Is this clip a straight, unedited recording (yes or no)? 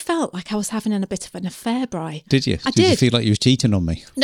yes